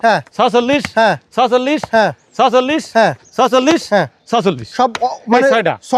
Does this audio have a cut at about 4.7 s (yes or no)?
no